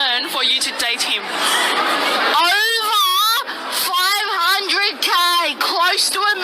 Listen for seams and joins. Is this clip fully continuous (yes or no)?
yes